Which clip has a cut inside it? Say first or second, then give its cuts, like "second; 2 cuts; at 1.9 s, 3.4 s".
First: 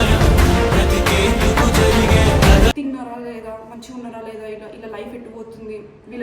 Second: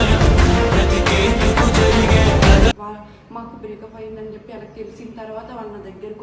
first; 1 cut; at 2.7 s